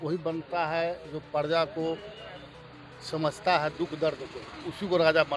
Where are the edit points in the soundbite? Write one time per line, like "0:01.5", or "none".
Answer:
none

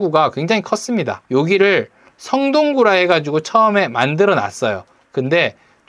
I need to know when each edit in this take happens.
0:01.2

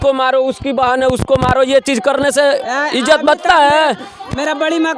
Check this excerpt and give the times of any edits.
none

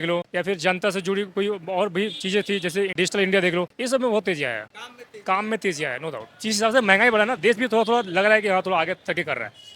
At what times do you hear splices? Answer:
0:02.9
0:06.3

